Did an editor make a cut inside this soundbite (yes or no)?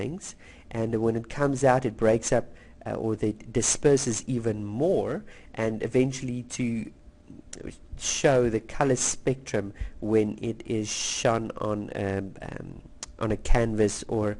yes